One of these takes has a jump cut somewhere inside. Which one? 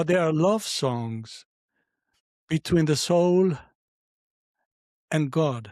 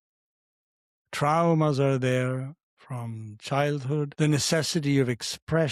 second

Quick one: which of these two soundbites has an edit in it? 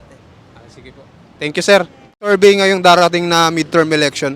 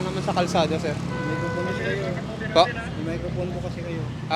first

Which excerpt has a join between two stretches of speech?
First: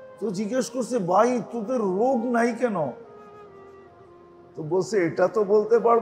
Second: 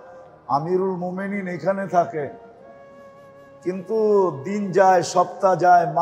first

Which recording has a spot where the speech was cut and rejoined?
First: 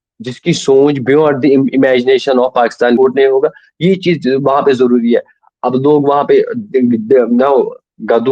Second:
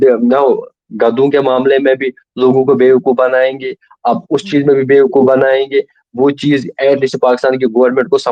first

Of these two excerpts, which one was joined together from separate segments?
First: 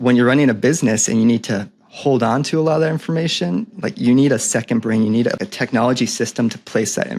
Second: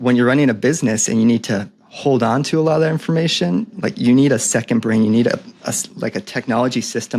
first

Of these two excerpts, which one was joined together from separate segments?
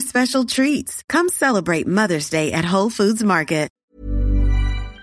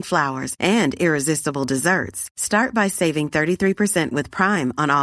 first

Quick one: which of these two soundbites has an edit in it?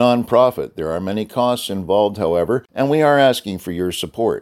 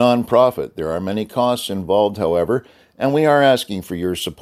first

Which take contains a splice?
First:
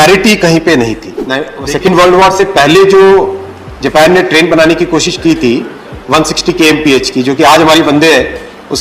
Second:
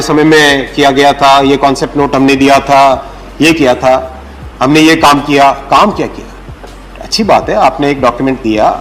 first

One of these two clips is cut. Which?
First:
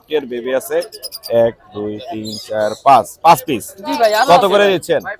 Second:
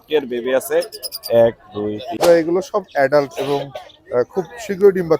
second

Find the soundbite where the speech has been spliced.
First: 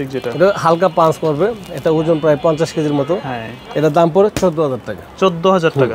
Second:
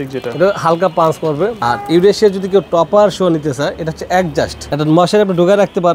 second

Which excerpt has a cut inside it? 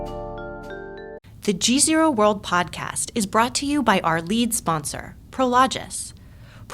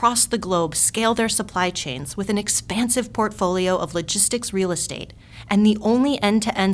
first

